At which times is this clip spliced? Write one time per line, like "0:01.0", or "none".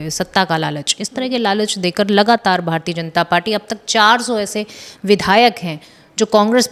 none